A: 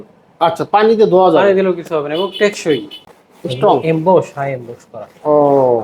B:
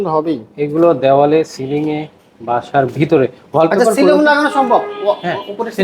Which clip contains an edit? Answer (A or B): A